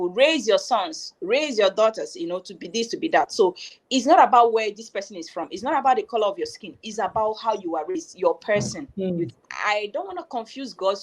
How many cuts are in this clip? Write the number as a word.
one